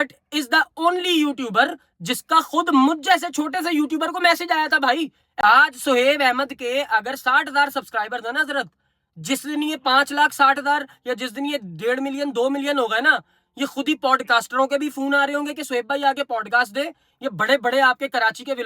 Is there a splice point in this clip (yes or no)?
yes